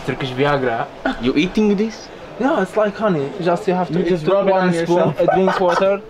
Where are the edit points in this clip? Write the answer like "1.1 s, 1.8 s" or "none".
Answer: none

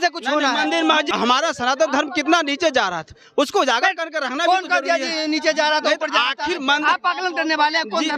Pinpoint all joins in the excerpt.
1.1 s

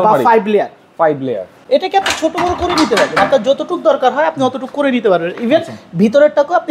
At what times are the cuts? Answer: 1.5 s

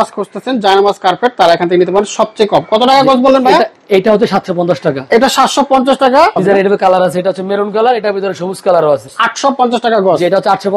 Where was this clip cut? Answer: 6.4 s, 9.1 s

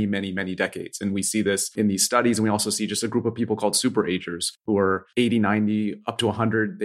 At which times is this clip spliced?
1.7 s, 4.7 s

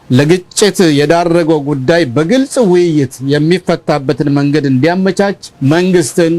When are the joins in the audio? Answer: 5.5 s

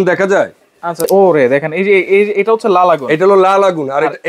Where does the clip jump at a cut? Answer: 1.1 s

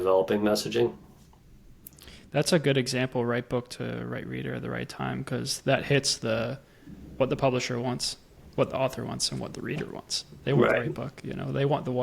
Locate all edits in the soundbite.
none

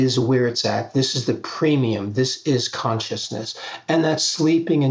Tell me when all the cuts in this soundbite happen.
none

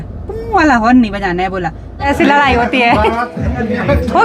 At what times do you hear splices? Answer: 1.9 s

